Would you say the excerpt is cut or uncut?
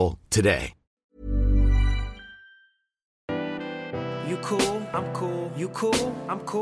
cut